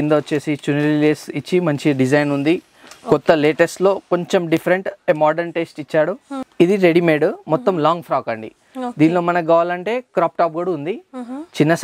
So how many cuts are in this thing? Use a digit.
1